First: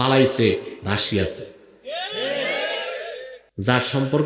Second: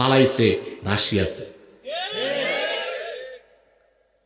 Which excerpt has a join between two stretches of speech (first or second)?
first